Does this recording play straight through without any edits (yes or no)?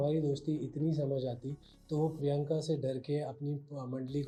yes